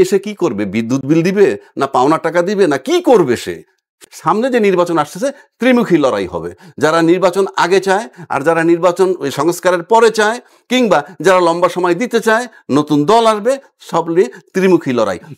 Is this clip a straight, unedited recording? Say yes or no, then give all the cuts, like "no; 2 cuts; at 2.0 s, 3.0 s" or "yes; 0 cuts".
no; 1 cut; at 3.9 s